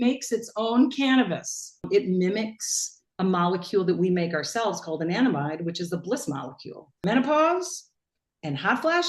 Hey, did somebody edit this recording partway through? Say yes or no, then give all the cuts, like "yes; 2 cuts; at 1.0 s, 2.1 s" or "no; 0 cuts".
yes; 2 cuts; at 1.9 s, 6.9 s